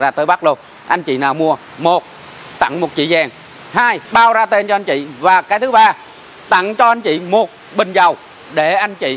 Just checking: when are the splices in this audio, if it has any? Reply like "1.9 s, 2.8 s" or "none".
1.7 s, 4.0 s

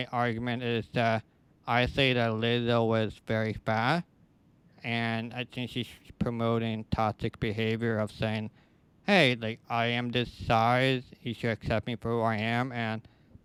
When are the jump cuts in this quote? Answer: none

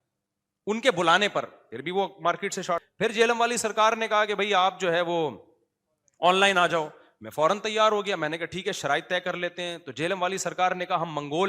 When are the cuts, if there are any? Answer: 2.8 s

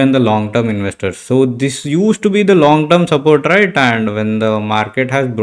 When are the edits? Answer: none

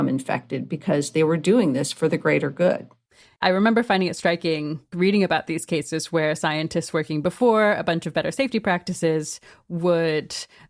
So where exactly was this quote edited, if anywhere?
3.2 s, 4.9 s

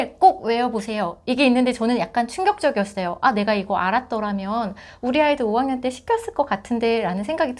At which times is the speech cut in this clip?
none

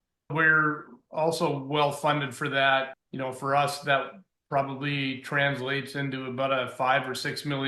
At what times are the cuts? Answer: 3.0 s

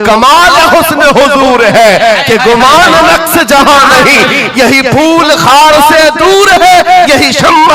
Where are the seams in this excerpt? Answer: none

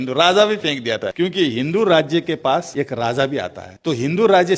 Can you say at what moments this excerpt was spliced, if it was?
1.1 s, 2.7 s, 3.6 s

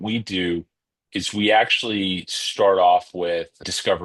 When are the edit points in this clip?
none

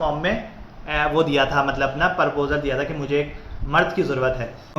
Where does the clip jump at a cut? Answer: none

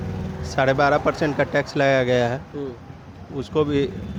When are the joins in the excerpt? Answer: none

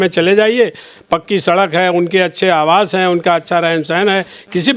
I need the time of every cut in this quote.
none

